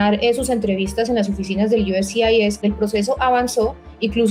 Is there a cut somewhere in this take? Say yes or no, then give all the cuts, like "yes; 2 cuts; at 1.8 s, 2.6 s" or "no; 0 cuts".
yes; 1 cut; at 2.6 s